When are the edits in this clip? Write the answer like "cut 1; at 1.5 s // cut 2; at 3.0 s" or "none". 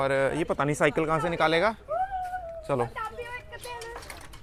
none

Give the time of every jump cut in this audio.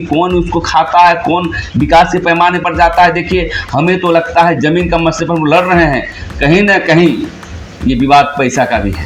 none

